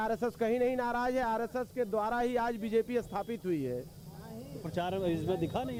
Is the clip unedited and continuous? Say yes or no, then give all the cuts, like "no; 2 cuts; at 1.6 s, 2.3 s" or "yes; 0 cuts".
yes; 0 cuts